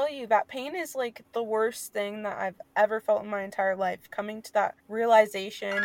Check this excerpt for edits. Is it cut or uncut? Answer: cut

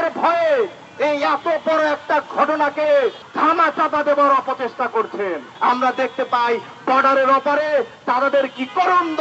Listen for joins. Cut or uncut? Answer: cut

